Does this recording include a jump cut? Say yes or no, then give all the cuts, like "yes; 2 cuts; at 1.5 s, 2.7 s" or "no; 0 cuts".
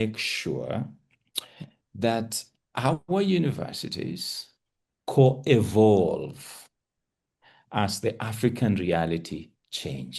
no; 0 cuts